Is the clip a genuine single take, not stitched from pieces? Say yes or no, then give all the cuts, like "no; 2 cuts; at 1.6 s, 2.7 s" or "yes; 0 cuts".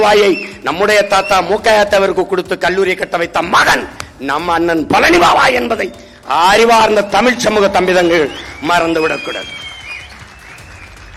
yes; 0 cuts